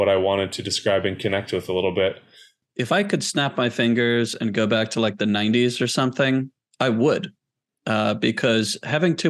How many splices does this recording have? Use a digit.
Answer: 1